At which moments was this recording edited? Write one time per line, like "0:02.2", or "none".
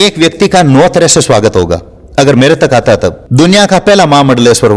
0:03.2